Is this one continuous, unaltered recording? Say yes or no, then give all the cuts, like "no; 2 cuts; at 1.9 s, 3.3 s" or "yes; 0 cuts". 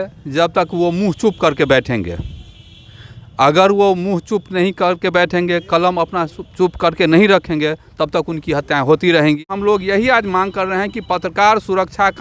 no; 1 cut; at 9.5 s